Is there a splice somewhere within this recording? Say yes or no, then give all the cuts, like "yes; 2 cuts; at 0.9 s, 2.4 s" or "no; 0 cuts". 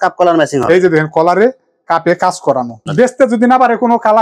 yes; 1 cut; at 2.9 s